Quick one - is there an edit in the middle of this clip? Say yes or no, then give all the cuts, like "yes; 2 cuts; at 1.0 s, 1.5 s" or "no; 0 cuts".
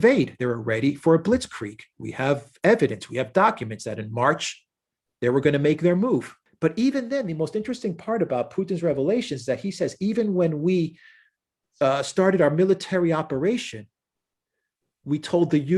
yes; 1 cut; at 6.4 s